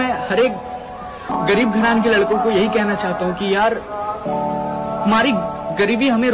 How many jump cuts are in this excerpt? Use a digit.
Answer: 0